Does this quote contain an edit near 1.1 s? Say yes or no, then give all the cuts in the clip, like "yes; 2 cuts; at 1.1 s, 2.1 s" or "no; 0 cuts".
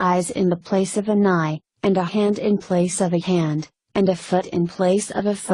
no; 0 cuts